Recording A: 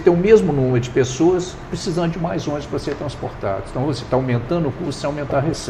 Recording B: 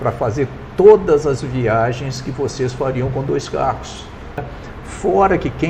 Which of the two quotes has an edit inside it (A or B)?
B